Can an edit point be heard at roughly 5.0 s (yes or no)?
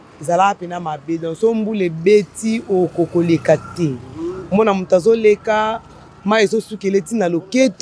no